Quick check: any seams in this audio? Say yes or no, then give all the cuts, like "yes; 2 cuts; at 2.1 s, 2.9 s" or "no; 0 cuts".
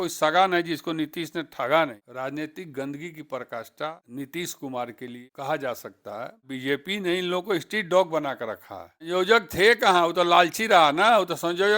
yes; 5 cuts; at 2.0 s, 4.0 s, 5.2 s, 6.5 s, 9.1 s